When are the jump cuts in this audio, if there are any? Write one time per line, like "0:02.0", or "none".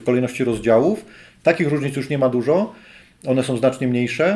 none